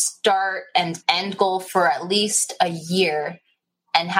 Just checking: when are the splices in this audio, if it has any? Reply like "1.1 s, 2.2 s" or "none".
1.0 s